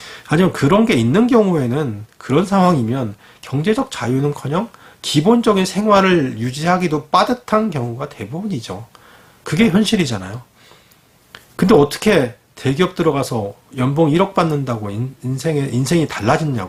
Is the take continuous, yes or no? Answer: yes